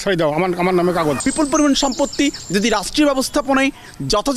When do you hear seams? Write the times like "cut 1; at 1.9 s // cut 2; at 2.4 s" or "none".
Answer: cut 1; at 1.2 s